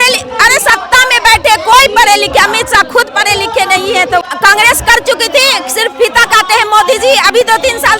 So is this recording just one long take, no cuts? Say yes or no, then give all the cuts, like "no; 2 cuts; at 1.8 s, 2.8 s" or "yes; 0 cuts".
no; 1 cut; at 4.2 s